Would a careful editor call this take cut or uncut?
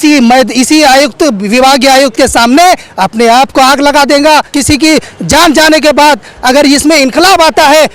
cut